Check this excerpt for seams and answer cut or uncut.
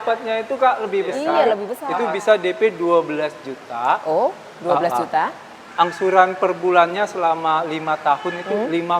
cut